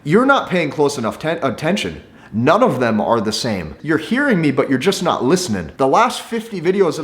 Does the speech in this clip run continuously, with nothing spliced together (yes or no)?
no